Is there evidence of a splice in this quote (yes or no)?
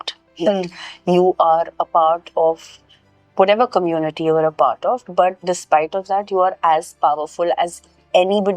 no